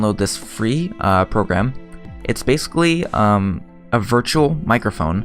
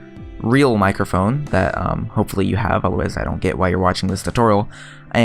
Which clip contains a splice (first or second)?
second